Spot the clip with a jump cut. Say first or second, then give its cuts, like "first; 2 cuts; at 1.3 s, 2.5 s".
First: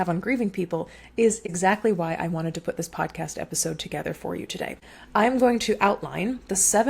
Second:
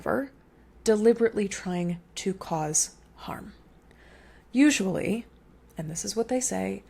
first; 2 cuts; at 1.4 s, 4.9 s